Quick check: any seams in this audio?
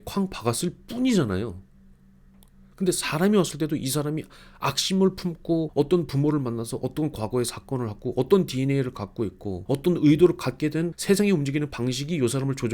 yes; 3 cuts; at 5.7 s, 9.5 s, 10.9 s

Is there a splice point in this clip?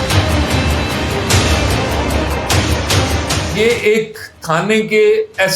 yes; 1 cut; at 3.5 s

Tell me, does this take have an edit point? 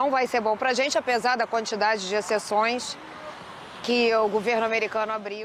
no; 0 cuts

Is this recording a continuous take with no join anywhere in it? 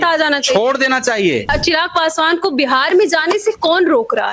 no; 1 cut; at 1.5 s

